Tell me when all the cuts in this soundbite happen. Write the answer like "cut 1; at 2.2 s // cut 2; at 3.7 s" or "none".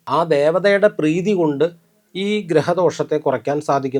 none